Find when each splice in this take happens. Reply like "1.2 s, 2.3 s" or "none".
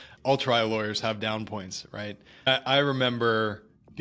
2.5 s